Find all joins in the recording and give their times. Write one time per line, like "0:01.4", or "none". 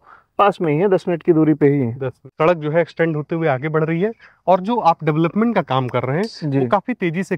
0:02.1